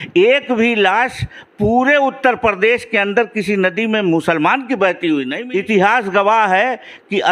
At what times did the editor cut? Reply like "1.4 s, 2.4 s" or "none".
5.4 s